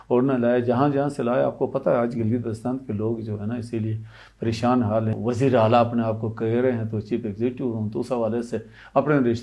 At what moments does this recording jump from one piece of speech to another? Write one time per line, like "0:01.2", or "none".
0:05.1